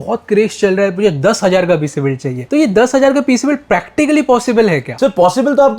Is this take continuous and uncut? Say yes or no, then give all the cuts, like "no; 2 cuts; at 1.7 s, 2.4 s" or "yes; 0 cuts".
yes; 0 cuts